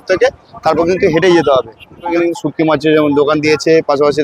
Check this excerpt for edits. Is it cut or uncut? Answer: cut